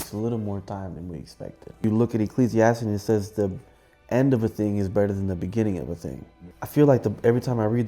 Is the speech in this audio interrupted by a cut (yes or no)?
yes